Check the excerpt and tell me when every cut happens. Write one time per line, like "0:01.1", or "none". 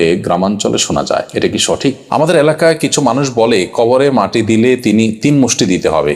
0:02.0